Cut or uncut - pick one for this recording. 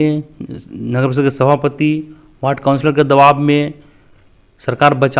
uncut